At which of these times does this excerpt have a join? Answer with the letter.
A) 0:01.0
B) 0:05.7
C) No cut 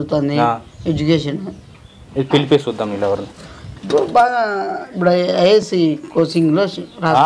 B